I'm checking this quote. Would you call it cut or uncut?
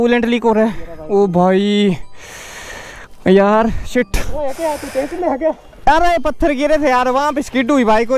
uncut